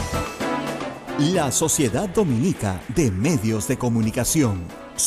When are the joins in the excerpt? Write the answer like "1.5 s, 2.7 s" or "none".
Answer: 0.9 s